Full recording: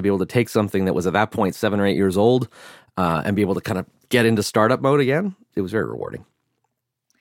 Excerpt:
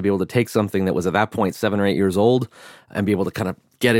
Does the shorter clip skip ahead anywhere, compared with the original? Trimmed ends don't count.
yes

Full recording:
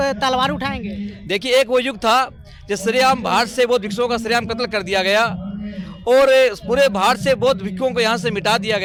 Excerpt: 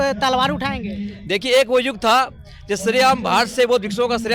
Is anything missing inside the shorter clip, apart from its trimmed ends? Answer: no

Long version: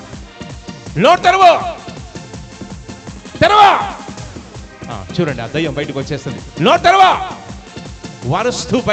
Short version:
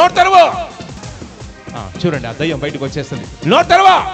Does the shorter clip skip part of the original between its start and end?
yes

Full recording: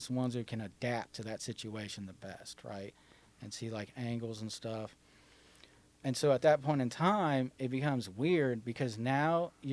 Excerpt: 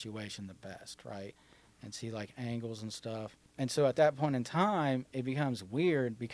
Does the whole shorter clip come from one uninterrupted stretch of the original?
no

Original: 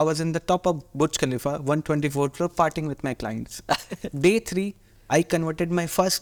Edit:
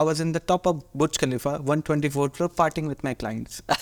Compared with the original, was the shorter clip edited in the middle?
no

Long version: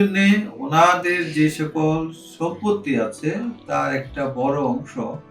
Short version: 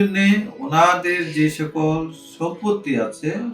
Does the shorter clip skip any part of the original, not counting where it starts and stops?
no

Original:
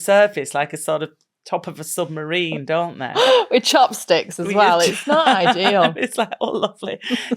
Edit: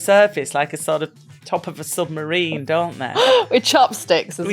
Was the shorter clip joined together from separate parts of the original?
no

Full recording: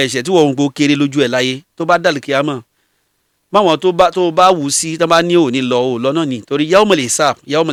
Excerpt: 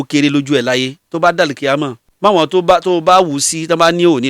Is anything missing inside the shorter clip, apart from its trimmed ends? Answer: yes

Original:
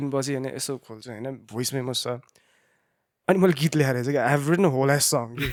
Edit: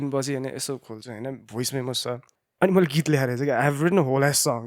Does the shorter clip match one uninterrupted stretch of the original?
no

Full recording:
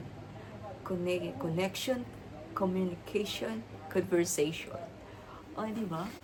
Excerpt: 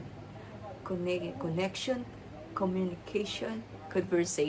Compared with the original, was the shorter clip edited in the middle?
no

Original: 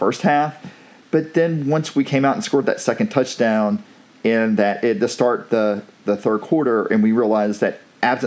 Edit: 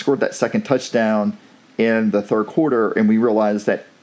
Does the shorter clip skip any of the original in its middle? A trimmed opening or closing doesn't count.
yes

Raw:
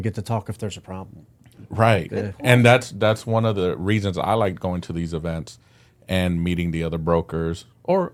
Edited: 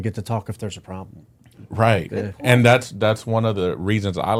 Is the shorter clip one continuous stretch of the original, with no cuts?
yes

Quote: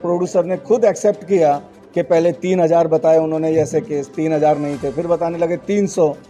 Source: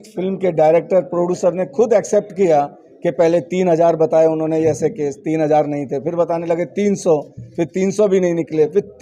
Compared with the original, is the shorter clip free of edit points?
yes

